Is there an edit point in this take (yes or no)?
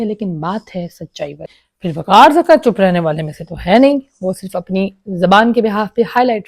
yes